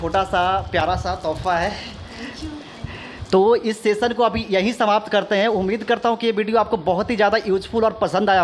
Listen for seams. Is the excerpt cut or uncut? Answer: uncut